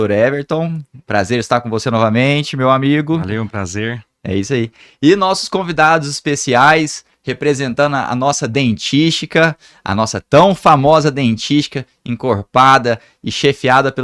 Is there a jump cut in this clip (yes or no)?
no